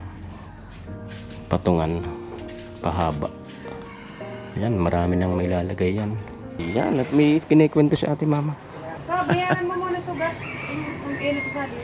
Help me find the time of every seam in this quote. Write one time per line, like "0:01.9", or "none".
0:06.6